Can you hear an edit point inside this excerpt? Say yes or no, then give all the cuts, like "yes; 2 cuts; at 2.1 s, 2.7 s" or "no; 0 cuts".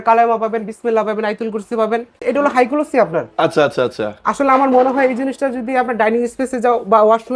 yes; 1 cut; at 2.1 s